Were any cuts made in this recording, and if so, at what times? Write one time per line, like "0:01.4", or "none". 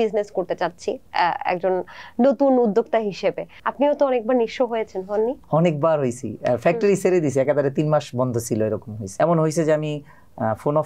0:09.0